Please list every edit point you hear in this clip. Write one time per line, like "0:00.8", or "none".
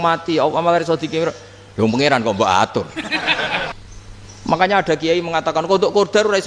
0:03.7